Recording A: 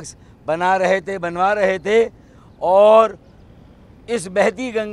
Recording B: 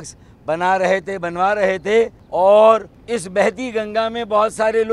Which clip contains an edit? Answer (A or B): B